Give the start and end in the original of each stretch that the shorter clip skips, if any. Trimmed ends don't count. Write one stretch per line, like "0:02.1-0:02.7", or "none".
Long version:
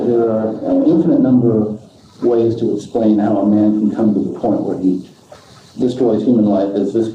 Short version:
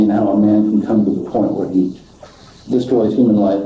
none